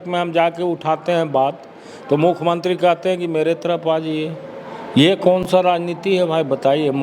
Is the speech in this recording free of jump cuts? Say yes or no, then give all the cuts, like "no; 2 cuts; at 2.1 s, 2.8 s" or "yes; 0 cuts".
yes; 0 cuts